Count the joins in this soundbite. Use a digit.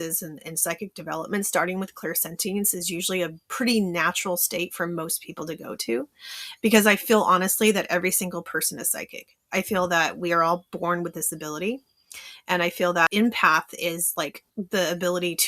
1